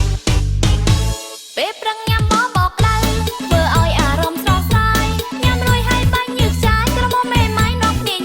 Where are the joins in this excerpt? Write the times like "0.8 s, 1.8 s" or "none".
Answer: 1.3 s